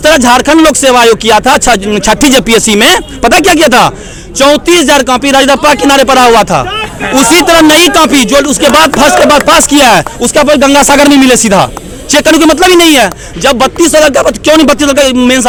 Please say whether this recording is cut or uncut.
uncut